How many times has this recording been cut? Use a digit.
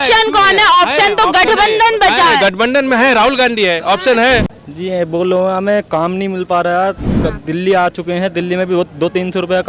1